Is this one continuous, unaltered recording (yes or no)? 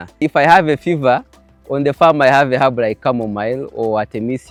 yes